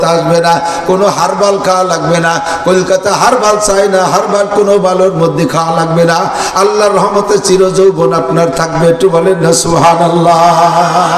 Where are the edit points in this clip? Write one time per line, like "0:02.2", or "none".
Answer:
none